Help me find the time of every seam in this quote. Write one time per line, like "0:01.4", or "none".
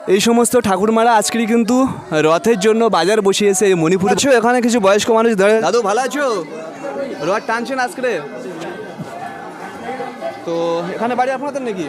0:04.2
0:05.6

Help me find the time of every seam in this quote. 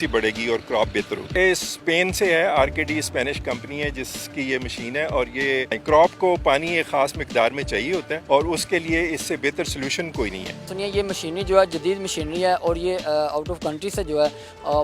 0:01.3
0:05.8
0:08.1
0:10.8

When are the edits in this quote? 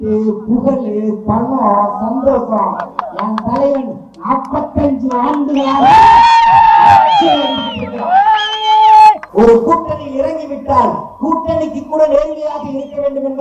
0:09.2

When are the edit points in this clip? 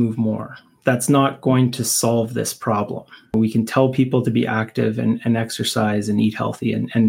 0:03.3

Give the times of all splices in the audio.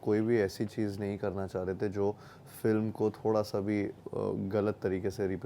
0:04.0

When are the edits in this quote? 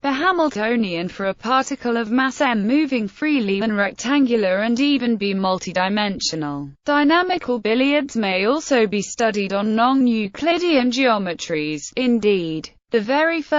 none

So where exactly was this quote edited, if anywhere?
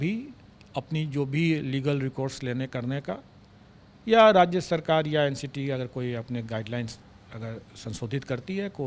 none

